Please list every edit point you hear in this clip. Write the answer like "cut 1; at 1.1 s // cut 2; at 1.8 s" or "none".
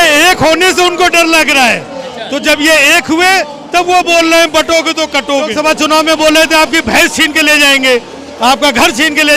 cut 1; at 5.5 s

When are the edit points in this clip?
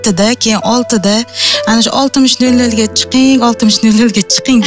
none

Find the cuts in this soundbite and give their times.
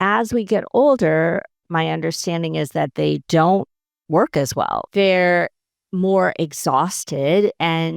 cut 1; at 4.8 s

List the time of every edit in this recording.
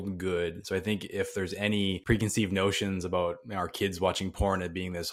cut 1; at 2.0 s

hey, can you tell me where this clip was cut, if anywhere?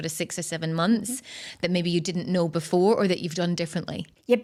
none

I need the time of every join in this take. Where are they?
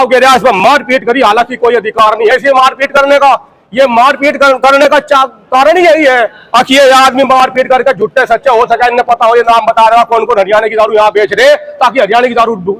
none

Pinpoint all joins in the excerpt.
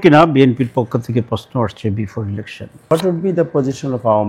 cut 1; at 2.9 s

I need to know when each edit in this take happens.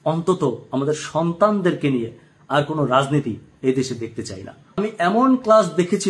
cut 1; at 4.7 s

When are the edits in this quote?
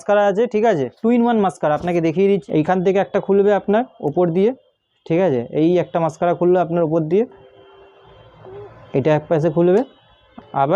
cut 1; at 0.9 s // cut 2; at 2.4 s

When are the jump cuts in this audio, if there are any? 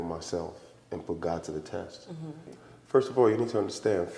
cut 1; at 2.6 s

